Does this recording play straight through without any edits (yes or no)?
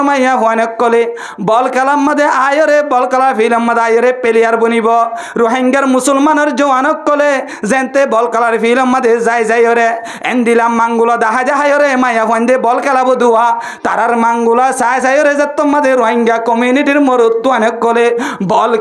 yes